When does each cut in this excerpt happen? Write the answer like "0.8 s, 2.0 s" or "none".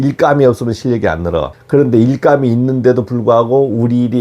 1.5 s